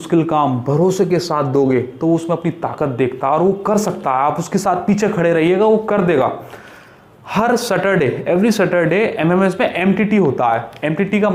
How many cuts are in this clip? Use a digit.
0